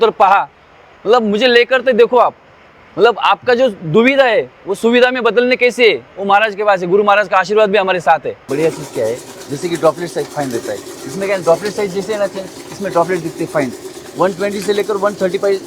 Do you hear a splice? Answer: yes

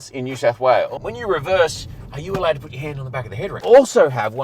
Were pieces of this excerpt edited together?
yes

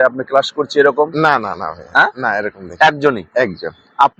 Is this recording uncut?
yes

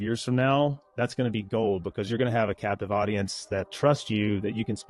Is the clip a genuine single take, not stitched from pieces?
yes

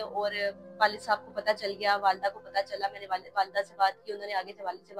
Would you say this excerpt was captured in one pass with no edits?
yes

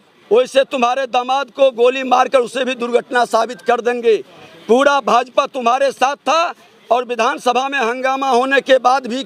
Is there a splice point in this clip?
no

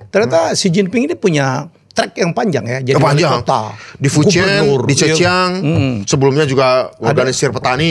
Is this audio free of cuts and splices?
yes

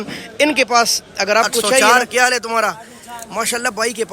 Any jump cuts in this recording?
yes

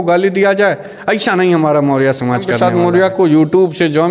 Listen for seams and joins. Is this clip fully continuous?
no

